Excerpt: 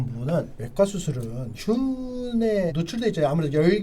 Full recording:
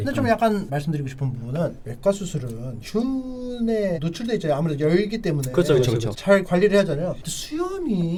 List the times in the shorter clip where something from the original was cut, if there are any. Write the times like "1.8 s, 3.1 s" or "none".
none